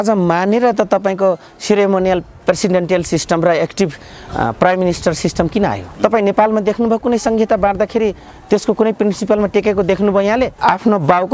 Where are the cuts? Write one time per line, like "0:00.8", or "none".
0:05.8
0:10.5